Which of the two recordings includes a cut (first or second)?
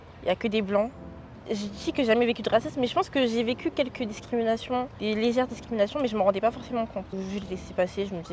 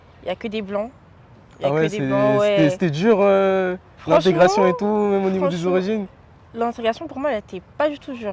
first